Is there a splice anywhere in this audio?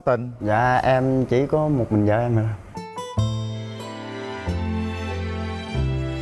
no; 0 cuts

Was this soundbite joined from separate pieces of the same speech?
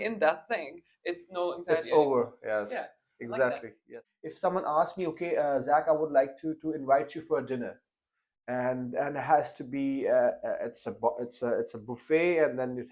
yes; 1 cut; at 3.9 s

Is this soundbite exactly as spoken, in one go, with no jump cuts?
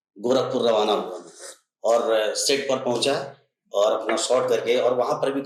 yes; 0 cuts

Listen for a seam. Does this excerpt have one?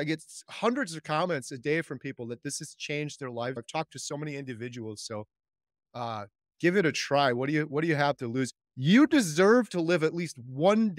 yes; 2 cuts; at 3.6 s, 8.6 s

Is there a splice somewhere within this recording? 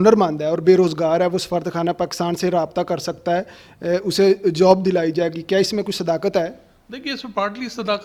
no; 0 cuts

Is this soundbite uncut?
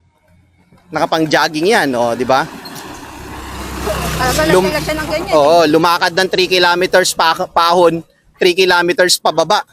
yes; 0 cuts

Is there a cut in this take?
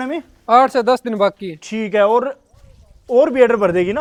no; 0 cuts

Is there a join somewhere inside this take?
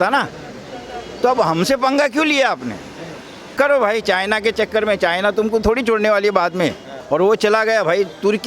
yes; 2 cuts; at 3.5 s, 6.9 s

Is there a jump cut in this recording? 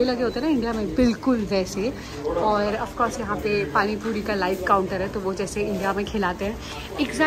no; 0 cuts

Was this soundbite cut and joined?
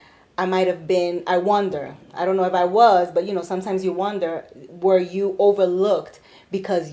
no; 0 cuts

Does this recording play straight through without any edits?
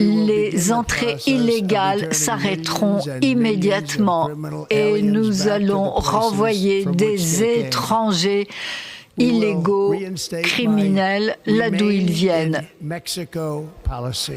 yes; 0 cuts

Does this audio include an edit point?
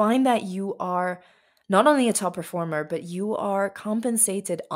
no; 0 cuts

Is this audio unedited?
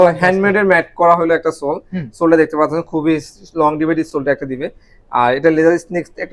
yes; 0 cuts

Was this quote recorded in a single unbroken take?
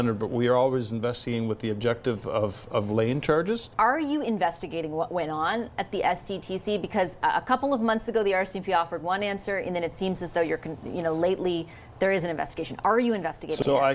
no; 1 cut; at 3.7 s

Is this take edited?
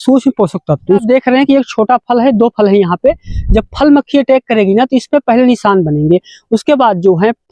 yes; 1 cut; at 1.0 s

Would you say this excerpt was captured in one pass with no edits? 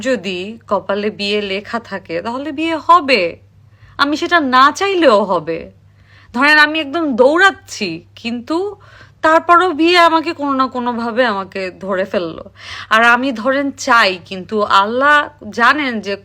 yes; 0 cuts

